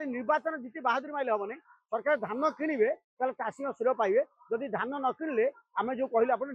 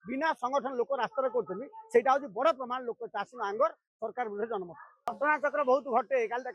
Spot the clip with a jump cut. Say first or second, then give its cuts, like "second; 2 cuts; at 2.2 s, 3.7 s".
second; 1 cut; at 5.1 s